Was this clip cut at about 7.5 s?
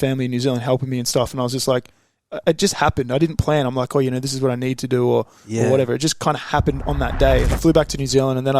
yes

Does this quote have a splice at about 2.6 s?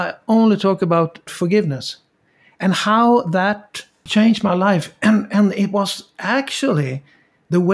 no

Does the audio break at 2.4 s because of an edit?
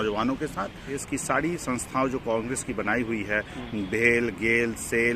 no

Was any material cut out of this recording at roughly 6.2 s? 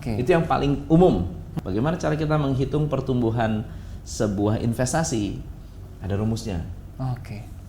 no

